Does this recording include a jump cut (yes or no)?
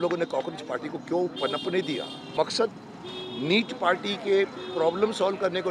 yes